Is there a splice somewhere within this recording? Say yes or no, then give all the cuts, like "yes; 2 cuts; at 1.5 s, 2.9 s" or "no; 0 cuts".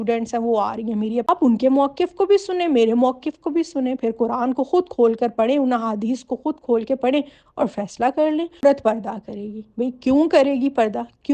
yes; 2 cuts; at 1.3 s, 8.6 s